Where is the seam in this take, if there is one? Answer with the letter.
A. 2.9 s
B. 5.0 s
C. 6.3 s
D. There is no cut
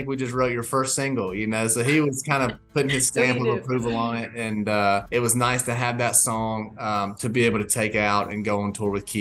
B